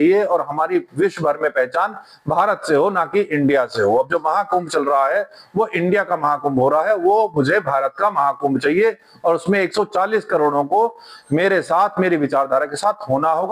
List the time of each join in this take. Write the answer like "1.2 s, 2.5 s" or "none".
none